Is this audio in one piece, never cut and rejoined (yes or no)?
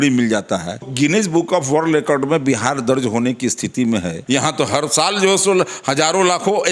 no